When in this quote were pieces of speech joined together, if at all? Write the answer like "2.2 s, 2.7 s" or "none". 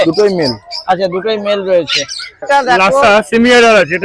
2.4 s